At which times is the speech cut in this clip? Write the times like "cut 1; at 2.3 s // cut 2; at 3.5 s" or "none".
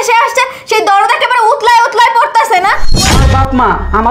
cut 1; at 3.1 s